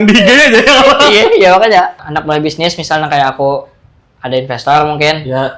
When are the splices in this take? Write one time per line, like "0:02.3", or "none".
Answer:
0:02.0

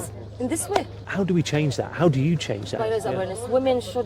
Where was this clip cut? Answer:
0:01.0
0:02.8

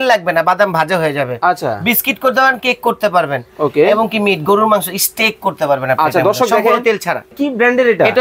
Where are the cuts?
0:07.3

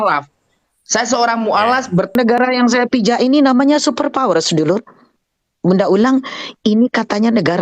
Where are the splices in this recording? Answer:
0:02.1

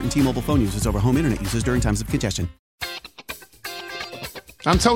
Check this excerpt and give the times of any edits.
0:02.6

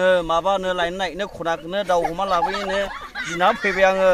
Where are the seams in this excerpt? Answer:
none

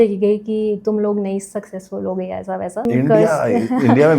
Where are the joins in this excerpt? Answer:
0:02.9

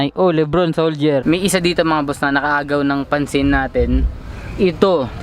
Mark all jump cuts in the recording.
0:01.2

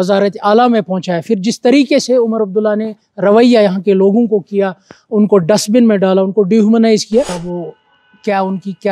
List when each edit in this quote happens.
0:07.4

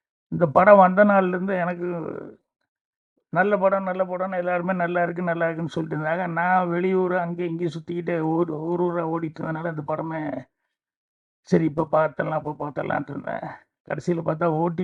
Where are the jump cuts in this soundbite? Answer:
none

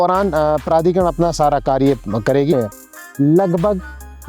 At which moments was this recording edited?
0:02.5

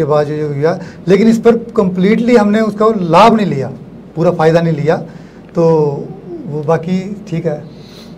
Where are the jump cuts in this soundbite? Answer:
none

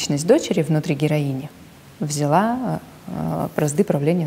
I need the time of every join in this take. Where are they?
none

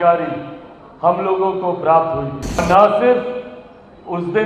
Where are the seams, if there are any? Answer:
0:02.6

